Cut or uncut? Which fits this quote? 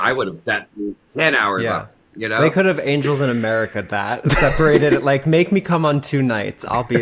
uncut